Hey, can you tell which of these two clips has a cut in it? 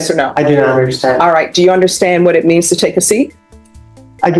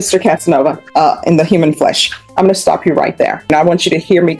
second; 2 cuts; at 0.8 s, 3.5 s

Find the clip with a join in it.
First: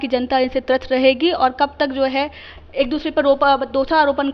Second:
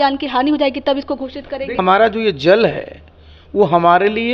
second; 1 cut; at 1.8 s

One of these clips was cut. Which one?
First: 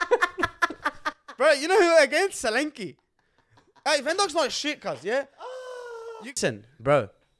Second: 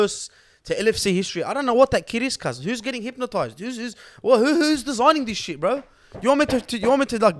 first; 1 cut; at 6.4 s

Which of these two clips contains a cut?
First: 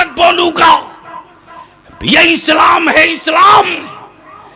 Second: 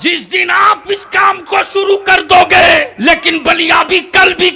second; 1 cut; at 2.9 s

